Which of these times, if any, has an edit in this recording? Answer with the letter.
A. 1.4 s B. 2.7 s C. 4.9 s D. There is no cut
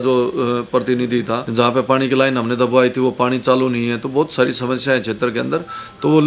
A